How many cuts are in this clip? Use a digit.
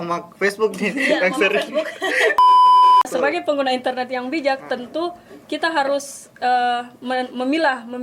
1